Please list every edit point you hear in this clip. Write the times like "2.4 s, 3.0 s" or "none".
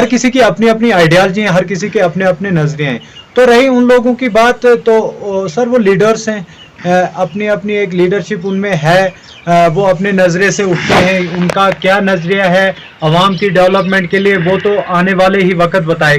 none

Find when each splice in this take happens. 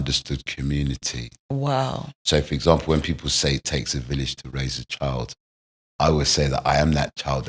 none

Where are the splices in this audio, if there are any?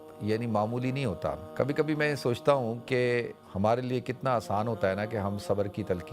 1.5 s, 3.4 s

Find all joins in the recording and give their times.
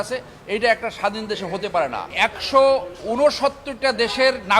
2.0 s

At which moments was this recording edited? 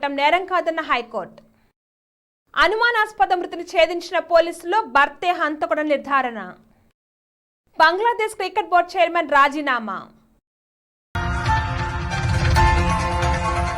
11.2 s

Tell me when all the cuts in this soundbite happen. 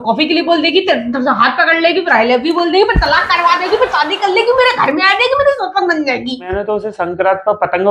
6.5 s

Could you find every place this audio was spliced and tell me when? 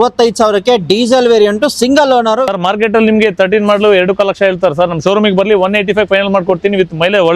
2.4 s

